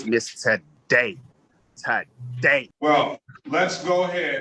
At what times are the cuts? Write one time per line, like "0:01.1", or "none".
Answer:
0:02.7